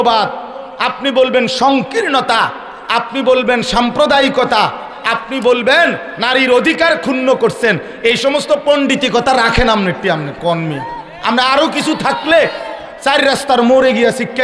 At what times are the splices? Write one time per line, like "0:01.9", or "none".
none

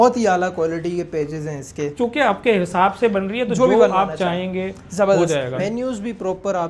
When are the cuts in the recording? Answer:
0:01.9
0:05.6

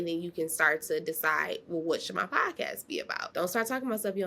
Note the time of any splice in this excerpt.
0:03.2

